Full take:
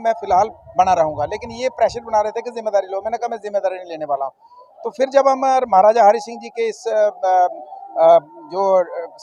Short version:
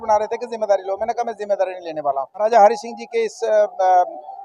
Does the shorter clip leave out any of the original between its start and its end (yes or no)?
yes